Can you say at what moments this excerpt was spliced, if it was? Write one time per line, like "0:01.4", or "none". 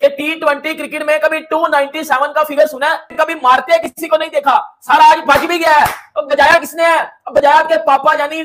none